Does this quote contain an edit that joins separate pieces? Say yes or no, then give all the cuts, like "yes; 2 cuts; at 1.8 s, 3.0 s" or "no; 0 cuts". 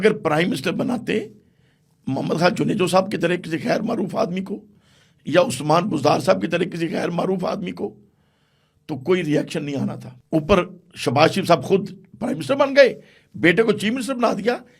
yes; 1 cut; at 10.1 s